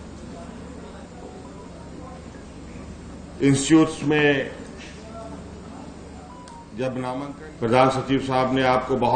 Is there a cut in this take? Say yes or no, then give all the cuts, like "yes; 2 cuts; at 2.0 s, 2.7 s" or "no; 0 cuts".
yes; 1 cut; at 7.2 s